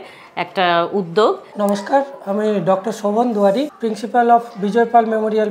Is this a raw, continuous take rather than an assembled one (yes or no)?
no